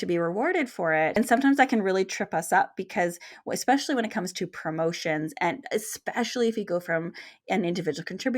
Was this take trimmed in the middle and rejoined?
yes; 1 cut; at 1.1 s

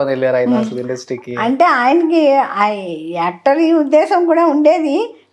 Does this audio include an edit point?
no; 0 cuts

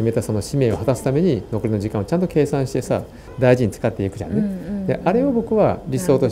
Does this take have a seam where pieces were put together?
yes; 1 cut; at 3.3 s

